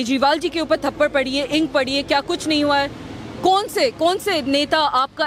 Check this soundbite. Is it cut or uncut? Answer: uncut